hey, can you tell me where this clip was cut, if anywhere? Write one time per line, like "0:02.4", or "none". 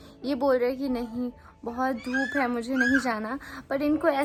none